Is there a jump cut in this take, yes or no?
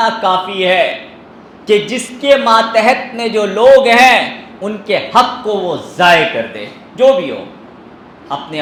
no